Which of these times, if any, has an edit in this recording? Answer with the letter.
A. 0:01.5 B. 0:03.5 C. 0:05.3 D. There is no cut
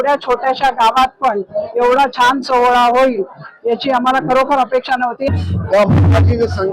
C